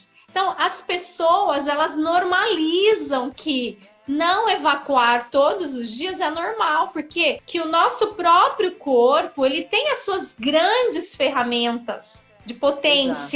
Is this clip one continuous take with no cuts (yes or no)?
no